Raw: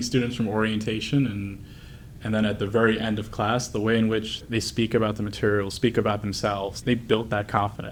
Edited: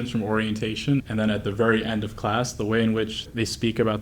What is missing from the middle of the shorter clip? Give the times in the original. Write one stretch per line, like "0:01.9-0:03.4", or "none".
0:01.3-0:02.2